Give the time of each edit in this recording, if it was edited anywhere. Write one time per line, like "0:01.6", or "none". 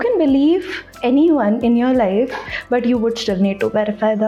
none